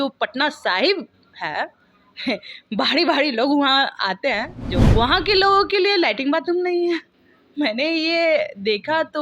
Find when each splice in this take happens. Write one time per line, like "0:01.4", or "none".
0:04.7